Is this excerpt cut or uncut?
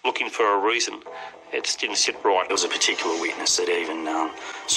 cut